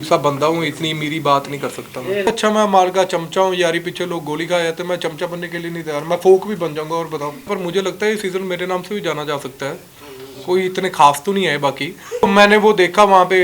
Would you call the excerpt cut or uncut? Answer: cut